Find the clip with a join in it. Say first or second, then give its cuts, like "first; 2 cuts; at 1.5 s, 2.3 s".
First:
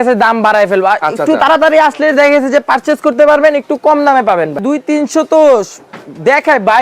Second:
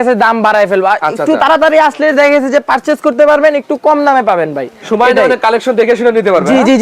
first; 1 cut; at 4.6 s